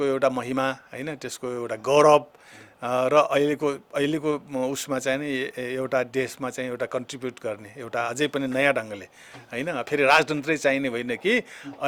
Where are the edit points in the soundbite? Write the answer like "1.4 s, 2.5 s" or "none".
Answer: none